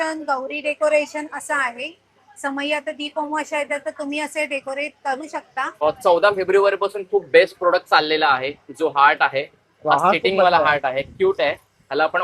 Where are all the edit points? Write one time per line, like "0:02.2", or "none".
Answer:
0:05.8